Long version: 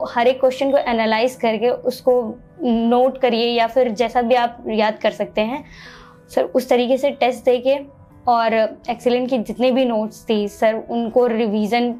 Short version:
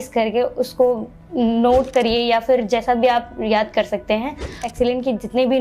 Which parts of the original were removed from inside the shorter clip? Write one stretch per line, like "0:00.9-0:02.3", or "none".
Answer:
0:05.9-0:08.8